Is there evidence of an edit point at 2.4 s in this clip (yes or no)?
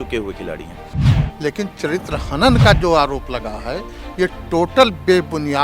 no